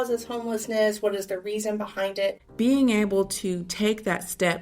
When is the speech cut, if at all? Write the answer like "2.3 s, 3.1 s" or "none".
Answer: 2.4 s